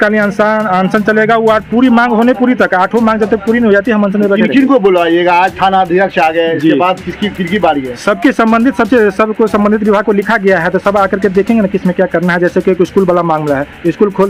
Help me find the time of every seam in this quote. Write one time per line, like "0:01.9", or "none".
none

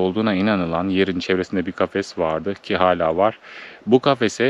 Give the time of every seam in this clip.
none

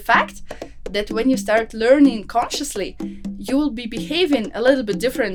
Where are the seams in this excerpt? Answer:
none

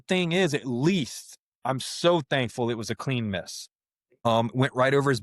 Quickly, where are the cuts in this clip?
0:04.3

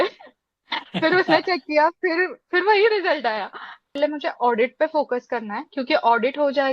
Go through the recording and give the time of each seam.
0:04.0

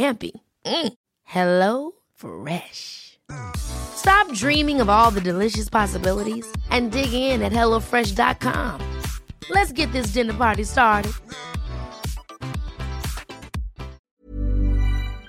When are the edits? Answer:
0:14.1

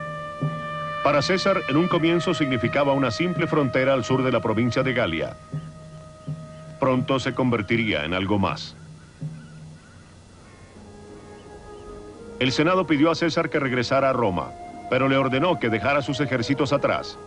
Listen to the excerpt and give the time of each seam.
0:13.9

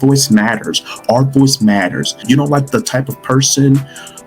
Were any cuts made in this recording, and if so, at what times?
0:02.2

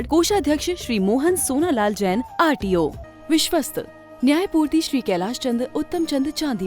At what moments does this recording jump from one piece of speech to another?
0:03.1

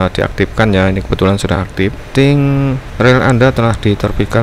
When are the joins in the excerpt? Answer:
0:02.0
0:02.8

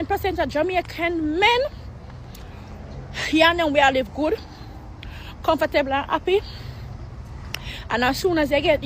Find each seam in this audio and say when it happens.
0:01.9

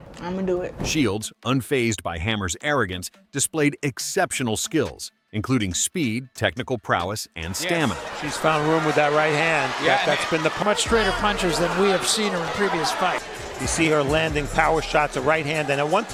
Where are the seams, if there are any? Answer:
none

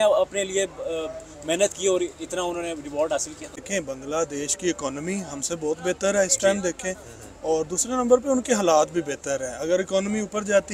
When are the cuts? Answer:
0:03.6

